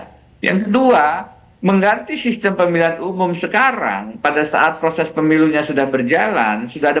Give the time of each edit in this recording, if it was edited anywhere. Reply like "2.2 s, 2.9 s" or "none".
none